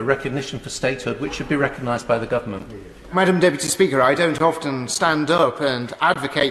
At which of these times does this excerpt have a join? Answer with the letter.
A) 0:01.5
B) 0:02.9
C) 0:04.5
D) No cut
D